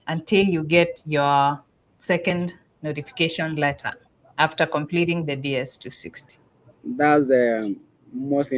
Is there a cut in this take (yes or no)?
no